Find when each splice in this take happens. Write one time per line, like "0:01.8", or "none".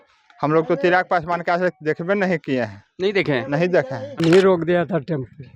0:04.2